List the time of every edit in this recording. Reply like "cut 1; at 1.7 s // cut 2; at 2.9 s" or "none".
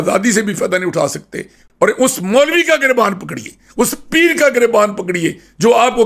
cut 1; at 1.7 s